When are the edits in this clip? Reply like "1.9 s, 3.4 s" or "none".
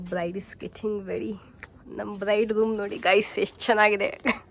none

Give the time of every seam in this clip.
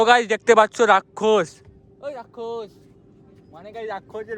none

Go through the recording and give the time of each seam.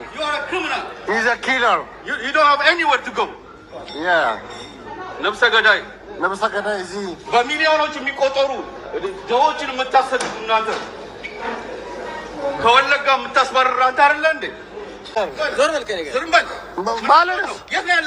15.2 s

